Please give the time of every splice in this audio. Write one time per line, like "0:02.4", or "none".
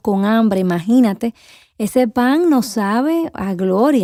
none